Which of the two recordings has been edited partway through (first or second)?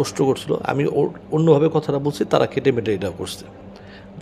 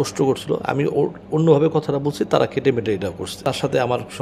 second